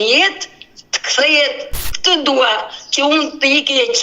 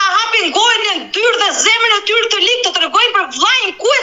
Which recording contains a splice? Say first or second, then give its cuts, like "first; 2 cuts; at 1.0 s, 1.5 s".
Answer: first; 1 cut; at 1.8 s